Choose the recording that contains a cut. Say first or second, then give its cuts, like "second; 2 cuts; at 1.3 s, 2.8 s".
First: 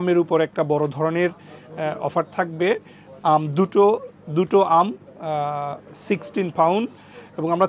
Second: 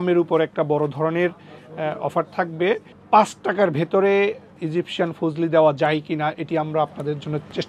second; 2 cuts; at 2.9 s, 4.6 s